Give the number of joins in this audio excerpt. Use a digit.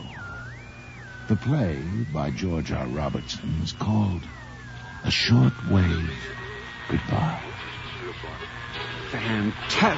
1